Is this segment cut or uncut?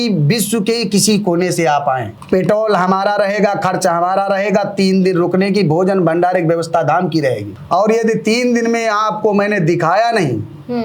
cut